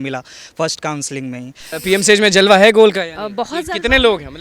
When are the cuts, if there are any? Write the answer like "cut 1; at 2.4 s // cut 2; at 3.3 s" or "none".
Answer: cut 1; at 1.7 s

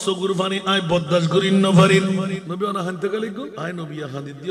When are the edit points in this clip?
cut 1; at 2.4 s // cut 2; at 3.5 s

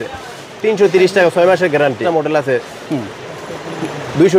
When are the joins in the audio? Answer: cut 1; at 2.0 s

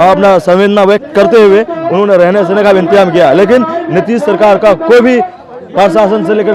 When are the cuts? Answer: none

